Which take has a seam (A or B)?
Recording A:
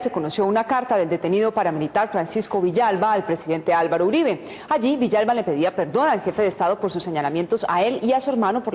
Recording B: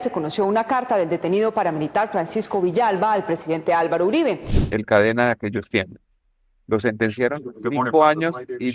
B